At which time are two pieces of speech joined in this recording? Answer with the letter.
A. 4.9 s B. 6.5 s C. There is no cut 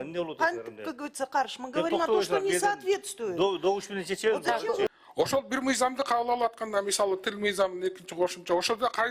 A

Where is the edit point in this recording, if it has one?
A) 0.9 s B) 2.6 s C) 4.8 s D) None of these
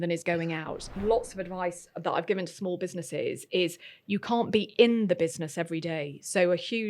A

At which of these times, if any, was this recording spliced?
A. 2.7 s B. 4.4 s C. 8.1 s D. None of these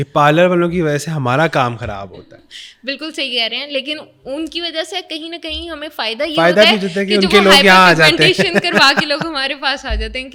D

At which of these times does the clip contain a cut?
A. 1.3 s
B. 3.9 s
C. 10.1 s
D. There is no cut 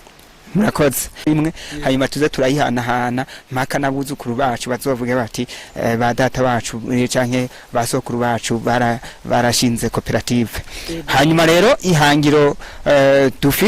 A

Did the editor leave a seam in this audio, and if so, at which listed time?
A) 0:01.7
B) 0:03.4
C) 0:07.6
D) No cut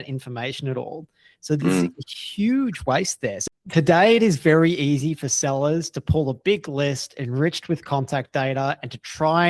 B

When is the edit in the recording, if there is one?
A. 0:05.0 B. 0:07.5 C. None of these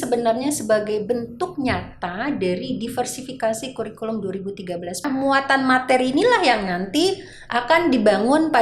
A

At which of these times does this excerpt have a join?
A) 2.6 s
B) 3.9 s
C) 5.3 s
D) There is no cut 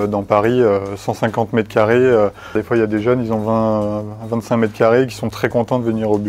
A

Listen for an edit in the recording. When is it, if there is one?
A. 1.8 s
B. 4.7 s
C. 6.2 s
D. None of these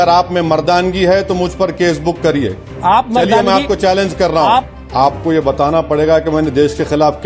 B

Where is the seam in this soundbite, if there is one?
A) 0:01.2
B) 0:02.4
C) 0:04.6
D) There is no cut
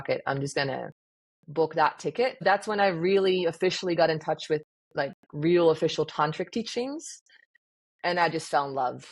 B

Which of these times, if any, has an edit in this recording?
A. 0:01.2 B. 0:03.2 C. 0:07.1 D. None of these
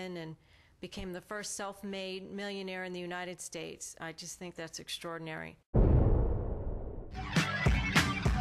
C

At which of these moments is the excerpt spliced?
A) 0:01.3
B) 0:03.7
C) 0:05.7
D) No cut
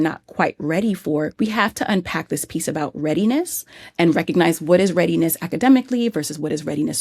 A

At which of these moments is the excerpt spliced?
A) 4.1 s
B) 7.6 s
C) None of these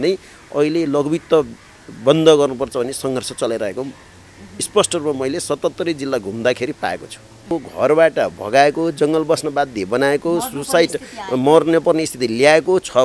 B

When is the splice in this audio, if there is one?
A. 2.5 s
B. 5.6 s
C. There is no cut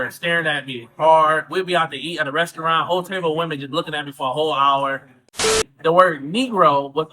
B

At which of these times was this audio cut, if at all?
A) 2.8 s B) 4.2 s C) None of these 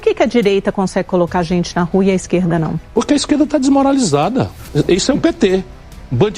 A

